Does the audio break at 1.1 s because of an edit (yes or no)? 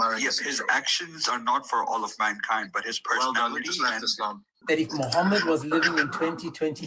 no